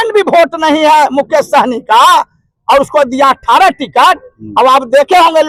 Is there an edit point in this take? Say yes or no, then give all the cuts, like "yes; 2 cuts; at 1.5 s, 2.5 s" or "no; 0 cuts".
no; 0 cuts